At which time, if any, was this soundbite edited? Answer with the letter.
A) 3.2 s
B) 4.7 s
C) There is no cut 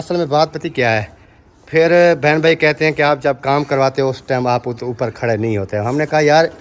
C